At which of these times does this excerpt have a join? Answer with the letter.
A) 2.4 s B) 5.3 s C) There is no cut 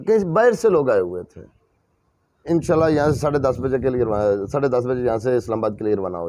A